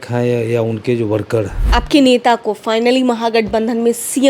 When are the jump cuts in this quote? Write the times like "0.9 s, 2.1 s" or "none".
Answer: 1.6 s